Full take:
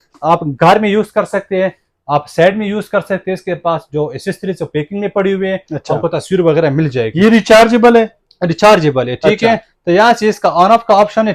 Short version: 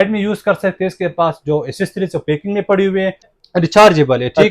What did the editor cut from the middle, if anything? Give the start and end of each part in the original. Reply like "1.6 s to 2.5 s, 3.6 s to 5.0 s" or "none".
5.8 s to 8.2 s